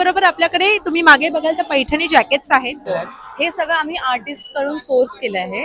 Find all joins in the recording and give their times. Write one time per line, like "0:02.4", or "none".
0:02.9